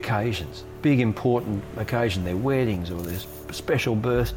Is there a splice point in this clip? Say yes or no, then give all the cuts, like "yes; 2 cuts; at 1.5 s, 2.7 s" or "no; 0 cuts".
no; 0 cuts